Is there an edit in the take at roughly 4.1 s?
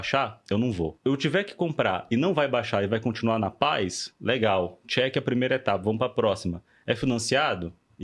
no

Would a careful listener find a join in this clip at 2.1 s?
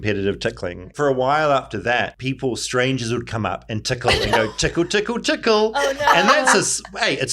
yes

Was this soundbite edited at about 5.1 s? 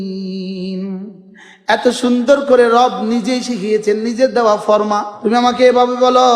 yes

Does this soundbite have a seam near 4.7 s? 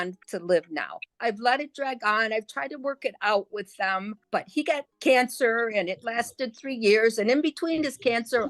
yes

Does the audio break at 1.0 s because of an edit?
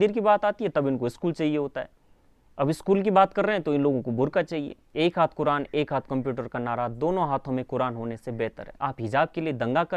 no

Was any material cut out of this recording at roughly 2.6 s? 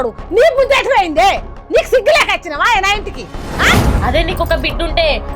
no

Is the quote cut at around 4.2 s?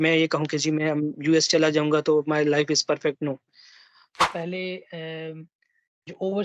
yes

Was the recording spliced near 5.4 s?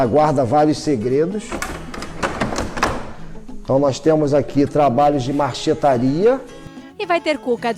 no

